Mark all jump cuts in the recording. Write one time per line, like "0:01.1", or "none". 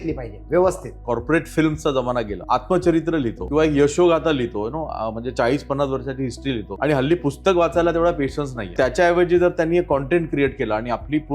0:01.0
0:02.4
0:03.4
0:06.7
0:08.7